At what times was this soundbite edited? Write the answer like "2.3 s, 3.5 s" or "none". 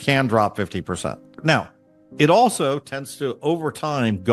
1.3 s